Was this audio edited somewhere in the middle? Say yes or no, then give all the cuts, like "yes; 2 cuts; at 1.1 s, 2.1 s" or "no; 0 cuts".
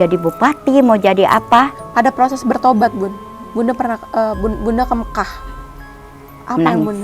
yes; 1 cut; at 1.8 s